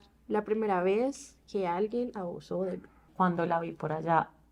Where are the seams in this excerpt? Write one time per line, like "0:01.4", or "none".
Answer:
0:03.1